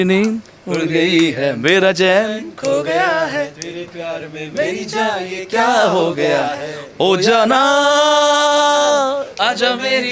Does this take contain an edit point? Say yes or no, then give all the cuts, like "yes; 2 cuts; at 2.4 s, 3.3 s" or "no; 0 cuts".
no; 0 cuts